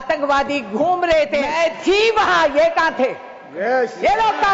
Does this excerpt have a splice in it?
yes; 1 cut; at 1.5 s

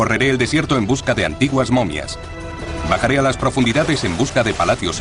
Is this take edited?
no; 0 cuts

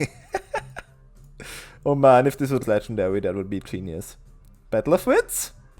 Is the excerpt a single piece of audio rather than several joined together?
no; 1 cut; at 2.6 s

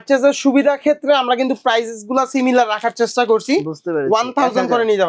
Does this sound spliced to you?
no; 0 cuts

